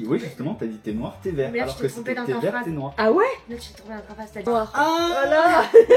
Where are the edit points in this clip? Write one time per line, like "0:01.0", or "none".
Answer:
0:04.5